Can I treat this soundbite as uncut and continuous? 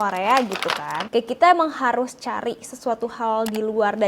no; 1 cut; at 1.1 s

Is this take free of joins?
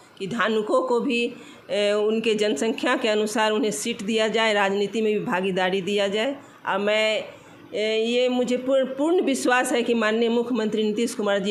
yes; 0 cuts

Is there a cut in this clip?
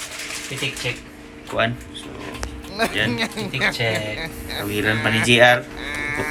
no; 0 cuts

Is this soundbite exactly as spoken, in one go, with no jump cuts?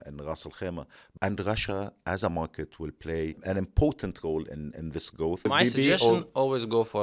no; 3 cuts; at 1.0 s, 3.4 s, 5.4 s

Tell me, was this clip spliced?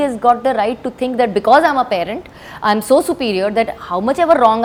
no; 0 cuts

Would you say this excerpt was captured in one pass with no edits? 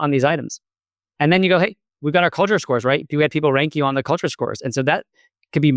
yes; 0 cuts

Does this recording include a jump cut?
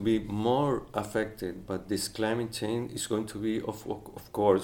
no; 0 cuts

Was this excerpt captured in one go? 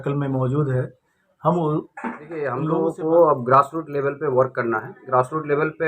no; 1 cut; at 2.5 s

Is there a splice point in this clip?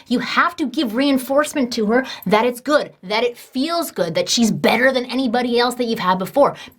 no; 0 cuts

